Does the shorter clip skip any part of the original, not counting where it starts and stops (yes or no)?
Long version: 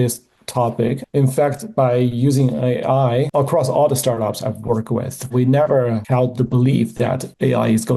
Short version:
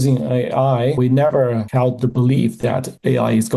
yes